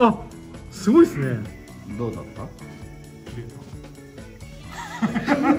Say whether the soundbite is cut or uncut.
cut